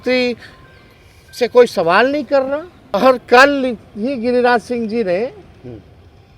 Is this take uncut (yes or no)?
no